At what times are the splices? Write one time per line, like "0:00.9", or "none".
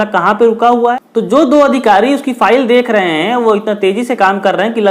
0:00.9